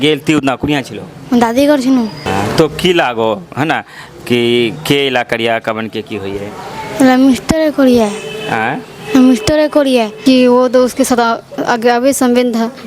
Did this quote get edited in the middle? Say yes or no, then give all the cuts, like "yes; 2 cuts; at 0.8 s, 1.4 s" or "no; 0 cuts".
yes; 2 cuts; at 2.3 s, 10.2 s